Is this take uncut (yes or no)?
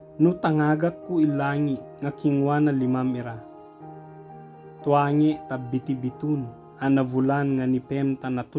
no